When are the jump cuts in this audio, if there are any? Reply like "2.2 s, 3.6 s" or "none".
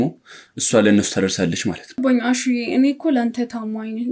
2.2 s